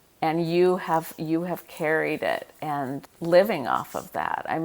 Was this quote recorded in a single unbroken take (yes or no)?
no